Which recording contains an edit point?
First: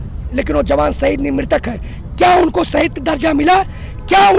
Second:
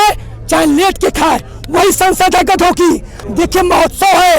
second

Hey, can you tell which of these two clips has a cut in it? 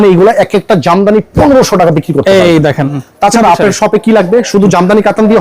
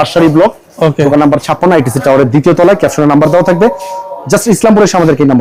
first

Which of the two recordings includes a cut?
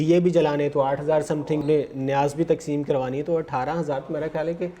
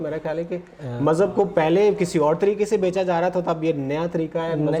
first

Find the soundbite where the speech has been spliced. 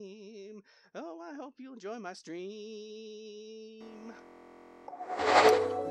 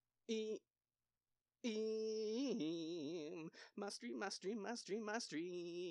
first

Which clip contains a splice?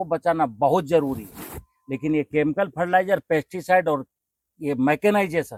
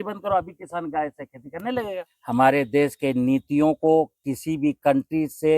second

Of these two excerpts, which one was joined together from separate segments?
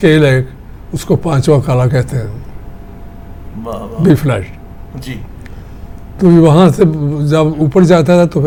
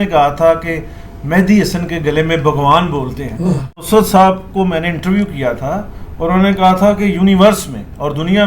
second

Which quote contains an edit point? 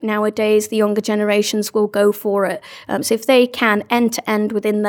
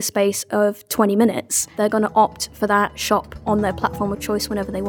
second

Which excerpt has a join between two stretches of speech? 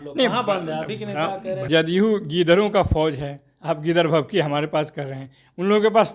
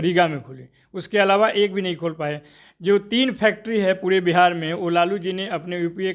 first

